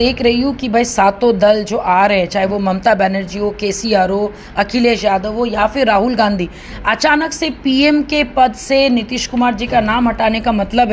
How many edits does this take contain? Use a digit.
0